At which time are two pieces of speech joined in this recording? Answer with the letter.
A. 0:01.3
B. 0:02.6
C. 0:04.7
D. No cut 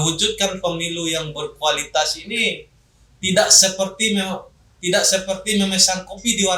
D